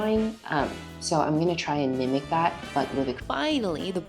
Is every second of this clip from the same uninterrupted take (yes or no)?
no